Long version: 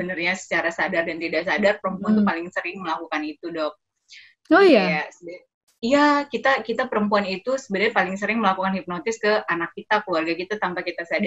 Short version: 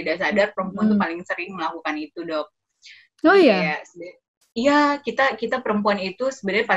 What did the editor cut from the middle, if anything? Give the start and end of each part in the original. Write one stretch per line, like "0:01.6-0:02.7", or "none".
none